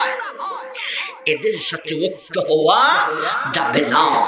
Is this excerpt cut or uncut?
uncut